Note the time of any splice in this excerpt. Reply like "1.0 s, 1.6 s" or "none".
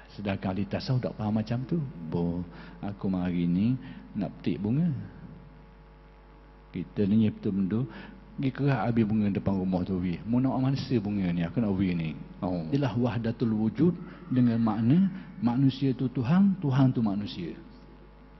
2.1 s, 12.7 s